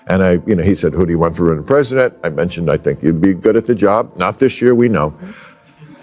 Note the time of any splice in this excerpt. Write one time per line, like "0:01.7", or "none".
none